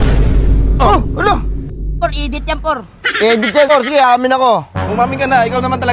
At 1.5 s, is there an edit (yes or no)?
no